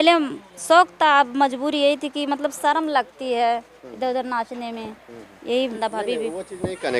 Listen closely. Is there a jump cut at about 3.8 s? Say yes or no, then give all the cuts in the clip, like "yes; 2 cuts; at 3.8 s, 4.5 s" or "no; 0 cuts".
no; 1 cut; at 5.8 s